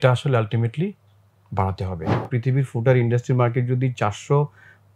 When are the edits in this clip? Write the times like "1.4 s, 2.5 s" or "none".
2.3 s